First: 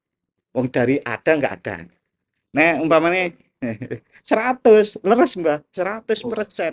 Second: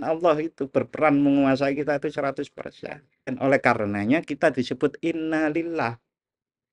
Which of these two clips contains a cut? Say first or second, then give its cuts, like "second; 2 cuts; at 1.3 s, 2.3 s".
second; 1 cut; at 3.3 s